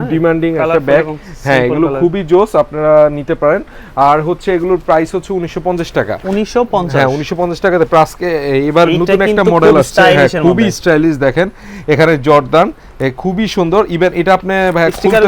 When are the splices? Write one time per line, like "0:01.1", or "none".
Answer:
none